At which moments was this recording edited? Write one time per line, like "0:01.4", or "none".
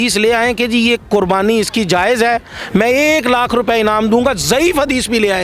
none